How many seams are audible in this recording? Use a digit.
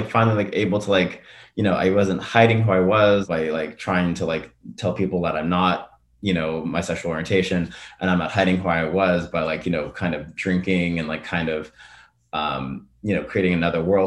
0